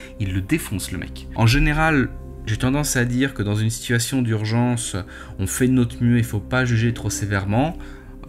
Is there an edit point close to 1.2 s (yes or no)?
yes